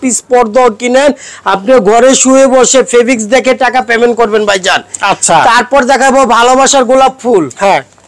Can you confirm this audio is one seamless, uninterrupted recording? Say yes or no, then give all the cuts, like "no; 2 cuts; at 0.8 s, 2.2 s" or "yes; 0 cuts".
yes; 0 cuts